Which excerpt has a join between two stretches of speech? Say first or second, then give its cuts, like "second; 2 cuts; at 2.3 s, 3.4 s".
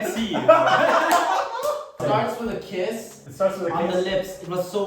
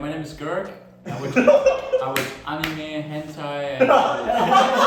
first; 1 cut; at 2.0 s